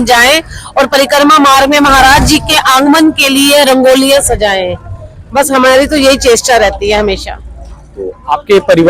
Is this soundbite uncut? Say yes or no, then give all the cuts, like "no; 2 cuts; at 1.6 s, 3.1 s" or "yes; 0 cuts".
yes; 0 cuts